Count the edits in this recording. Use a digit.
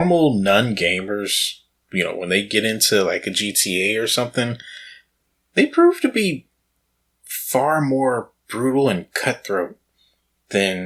0